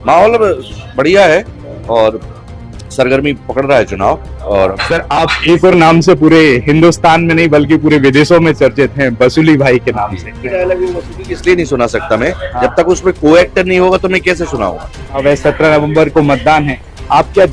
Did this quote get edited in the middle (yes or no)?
yes